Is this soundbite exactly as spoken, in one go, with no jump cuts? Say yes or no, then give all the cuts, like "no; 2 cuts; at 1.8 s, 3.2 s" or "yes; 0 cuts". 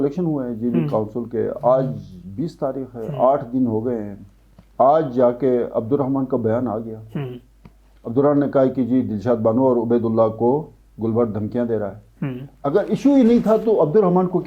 yes; 0 cuts